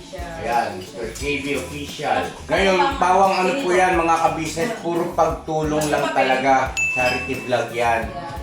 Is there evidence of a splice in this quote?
yes; 1 cut; at 2.4 s

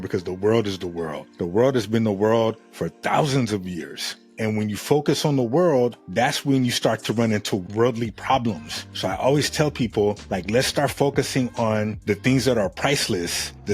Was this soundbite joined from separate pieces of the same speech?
yes; 1 cut; at 4.3 s

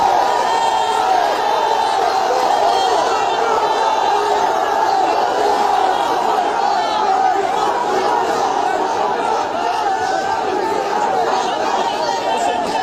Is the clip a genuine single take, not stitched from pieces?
yes; 0 cuts

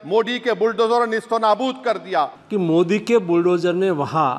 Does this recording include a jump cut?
yes; 1 cut; at 2.4 s

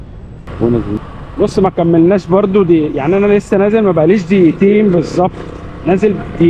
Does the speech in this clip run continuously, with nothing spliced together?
no; 1 cut; at 1.0 s

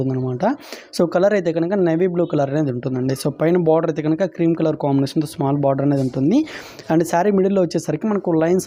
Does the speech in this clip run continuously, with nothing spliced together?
yes; 0 cuts

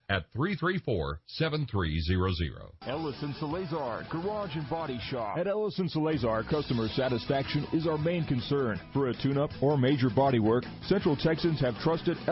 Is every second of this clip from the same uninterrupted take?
no; 1 cut; at 2.7 s

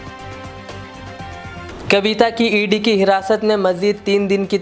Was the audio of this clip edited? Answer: yes; 1 cut; at 1.7 s

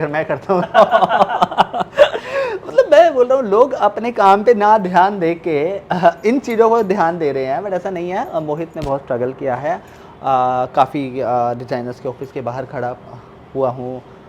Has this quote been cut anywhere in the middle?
no; 0 cuts

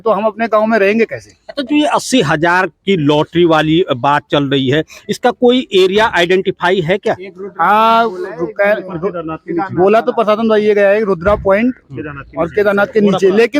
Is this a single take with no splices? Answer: yes; 0 cuts

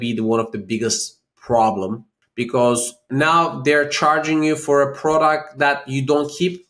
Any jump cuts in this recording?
yes; 2 cuts; at 2.1 s, 3.1 s

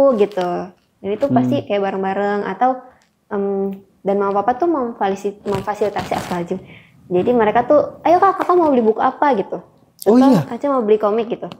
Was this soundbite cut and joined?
no; 0 cuts

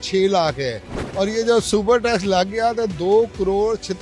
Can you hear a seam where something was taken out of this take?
no; 0 cuts

